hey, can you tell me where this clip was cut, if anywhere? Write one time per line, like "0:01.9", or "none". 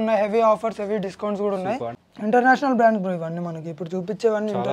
0:01.9